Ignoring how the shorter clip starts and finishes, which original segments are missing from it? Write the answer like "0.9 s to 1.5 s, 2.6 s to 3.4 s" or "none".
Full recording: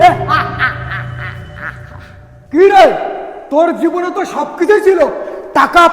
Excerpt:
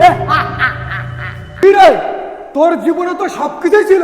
1.6 s to 2.6 s